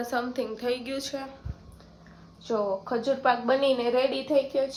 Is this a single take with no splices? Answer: yes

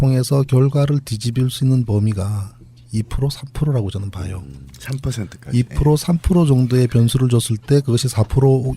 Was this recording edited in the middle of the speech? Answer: yes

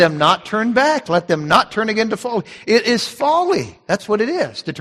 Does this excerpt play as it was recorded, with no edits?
yes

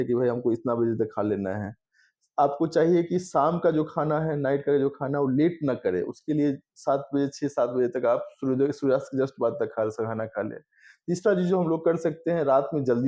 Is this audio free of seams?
yes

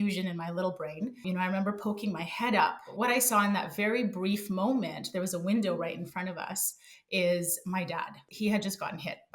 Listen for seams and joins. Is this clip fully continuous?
no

